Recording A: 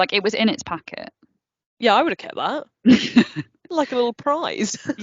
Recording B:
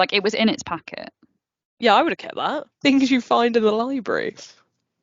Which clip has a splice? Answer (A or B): B